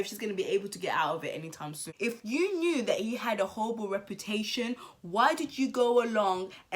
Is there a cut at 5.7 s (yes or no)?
no